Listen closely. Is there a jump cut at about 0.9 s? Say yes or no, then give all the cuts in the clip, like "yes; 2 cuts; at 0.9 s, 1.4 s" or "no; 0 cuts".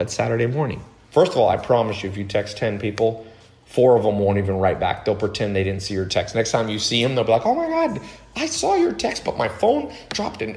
yes; 1 cut; at 0.9 s